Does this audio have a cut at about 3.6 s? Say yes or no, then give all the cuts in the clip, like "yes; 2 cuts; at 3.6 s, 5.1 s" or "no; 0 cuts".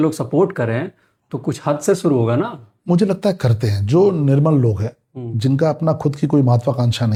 no; 0 cuts